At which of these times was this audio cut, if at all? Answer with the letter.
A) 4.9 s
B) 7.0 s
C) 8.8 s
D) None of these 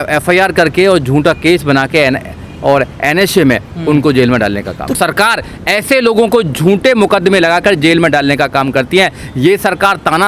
A